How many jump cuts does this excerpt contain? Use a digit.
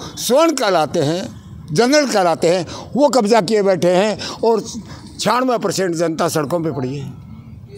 0